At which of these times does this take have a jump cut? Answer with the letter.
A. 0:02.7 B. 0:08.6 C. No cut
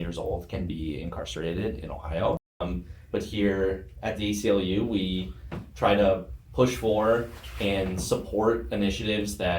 A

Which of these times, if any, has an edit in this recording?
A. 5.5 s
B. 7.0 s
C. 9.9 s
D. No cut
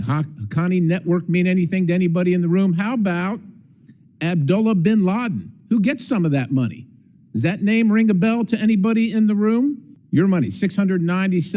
C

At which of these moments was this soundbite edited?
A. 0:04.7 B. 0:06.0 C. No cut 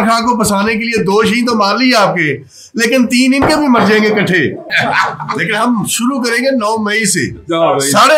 A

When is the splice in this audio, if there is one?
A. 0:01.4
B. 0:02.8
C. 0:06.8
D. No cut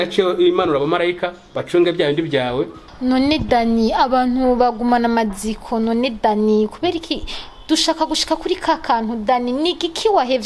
B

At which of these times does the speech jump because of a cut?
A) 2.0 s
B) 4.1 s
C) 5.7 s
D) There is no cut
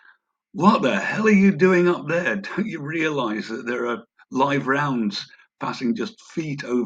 D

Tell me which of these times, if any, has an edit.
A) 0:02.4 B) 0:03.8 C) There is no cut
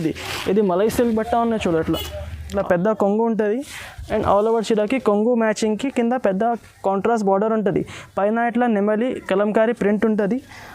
A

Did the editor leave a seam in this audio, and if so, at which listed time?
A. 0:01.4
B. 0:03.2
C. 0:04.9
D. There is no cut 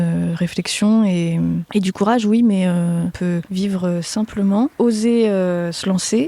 B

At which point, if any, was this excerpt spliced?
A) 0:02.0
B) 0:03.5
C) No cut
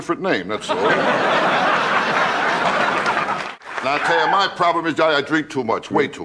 B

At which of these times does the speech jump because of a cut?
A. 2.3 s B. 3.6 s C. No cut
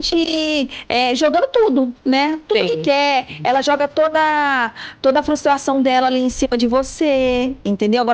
C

